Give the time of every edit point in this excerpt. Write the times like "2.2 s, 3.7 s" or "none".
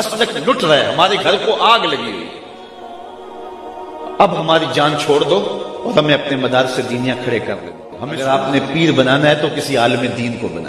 8.2 s